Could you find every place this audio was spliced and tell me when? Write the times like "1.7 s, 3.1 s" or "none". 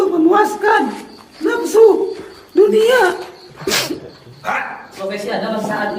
4.2 s